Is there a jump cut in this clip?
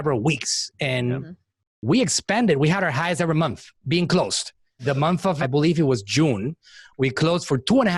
no; 0 cuts

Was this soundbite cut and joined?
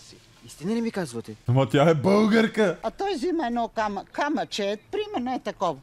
yes; 2 cuts; at 1.4 s, 2.8 s

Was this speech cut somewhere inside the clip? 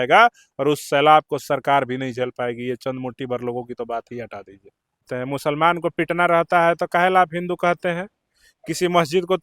yes; 1 cut; at 5.1 s

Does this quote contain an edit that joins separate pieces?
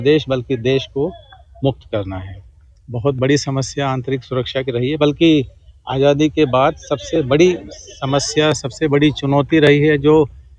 no; 0 cuts

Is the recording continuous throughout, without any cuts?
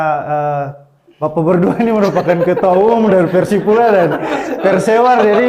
yes; 0 cuts

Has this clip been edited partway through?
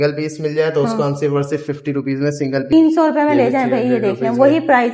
yes; 1 cut; at 2.7 s

